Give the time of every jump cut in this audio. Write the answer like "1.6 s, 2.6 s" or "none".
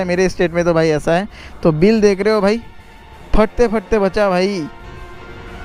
none